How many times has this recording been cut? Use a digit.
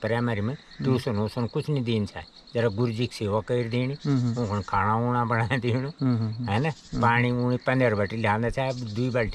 0